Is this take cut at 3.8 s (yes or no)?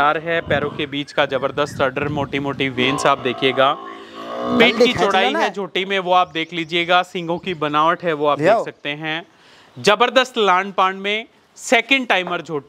no